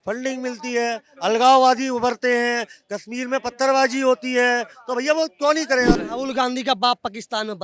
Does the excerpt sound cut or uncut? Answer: cut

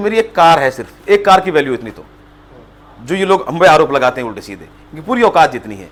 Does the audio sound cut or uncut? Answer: uncut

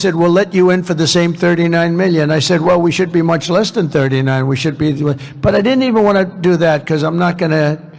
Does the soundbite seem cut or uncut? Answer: uncut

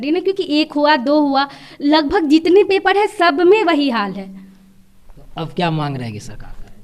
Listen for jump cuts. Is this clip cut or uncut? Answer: uncut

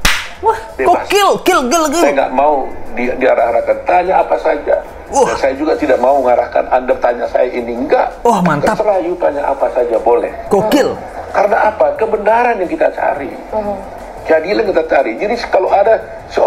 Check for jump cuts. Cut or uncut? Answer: uncut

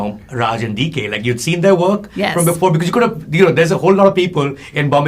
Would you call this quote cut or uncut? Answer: uncut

